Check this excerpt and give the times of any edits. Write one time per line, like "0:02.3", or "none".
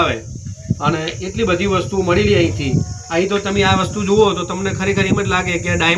none